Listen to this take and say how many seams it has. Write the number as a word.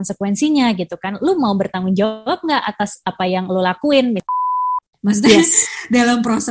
one